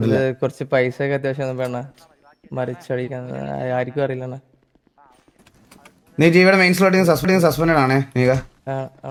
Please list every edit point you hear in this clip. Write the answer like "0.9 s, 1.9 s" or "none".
none